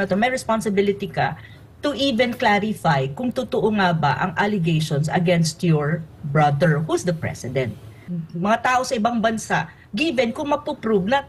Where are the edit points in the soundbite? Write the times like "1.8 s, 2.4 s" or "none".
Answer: 8.0 s